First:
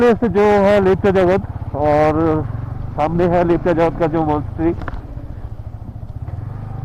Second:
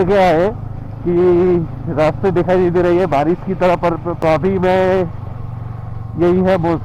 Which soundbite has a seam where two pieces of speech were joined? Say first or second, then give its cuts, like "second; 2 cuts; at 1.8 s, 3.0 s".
second; 1 cut; at 4.1 s